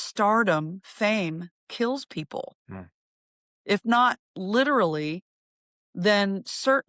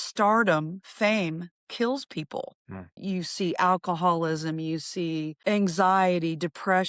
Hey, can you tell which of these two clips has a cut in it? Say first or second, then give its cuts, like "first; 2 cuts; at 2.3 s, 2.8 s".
second; 1 cut; at 2.9 s